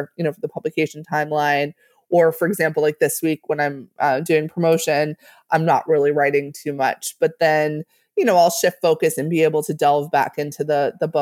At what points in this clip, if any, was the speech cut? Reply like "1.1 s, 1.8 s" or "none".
none